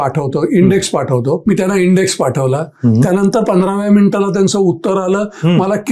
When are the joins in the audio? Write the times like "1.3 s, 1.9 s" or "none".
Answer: 1.4 s

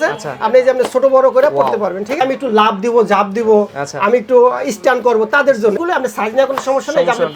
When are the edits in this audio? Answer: 2.2 s, 5.8 s

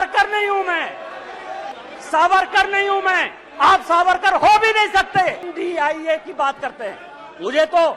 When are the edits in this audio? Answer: 1.7 s, 5.5 s

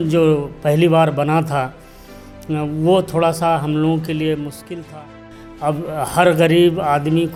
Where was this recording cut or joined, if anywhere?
none

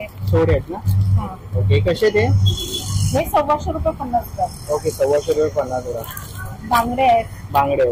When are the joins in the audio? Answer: none

